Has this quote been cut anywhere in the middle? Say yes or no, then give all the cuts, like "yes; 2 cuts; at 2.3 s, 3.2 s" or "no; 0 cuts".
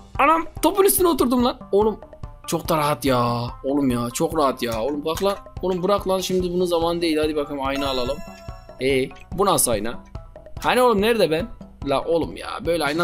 no; 0 cuts